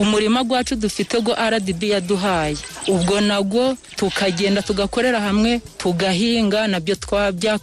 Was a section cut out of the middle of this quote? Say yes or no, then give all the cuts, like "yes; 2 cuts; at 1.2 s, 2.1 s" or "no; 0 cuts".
no; 0 cuts